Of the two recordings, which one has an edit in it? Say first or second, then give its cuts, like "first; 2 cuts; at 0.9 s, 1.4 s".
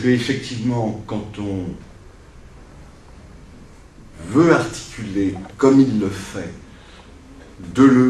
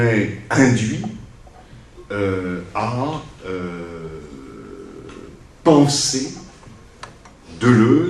second; 1 cut; at 5.5 s